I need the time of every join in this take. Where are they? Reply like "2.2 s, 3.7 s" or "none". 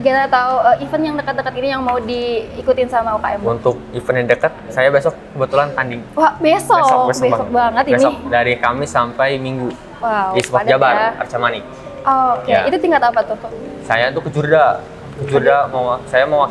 none